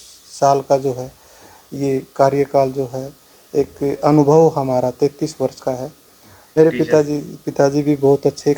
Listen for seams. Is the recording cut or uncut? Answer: cut